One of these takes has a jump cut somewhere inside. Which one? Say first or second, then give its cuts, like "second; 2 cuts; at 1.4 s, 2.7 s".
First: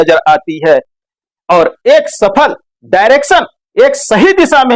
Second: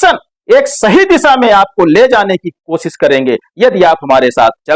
first; 1 cut; at 0.9 s